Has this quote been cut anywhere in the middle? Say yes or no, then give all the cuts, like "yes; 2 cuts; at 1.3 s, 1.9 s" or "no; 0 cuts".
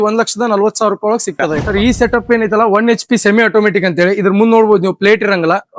yes; 1 cut; at 1.6 s